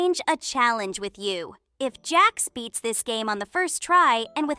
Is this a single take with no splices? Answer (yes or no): yes